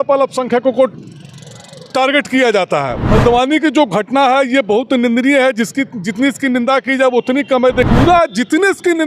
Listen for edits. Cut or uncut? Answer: cut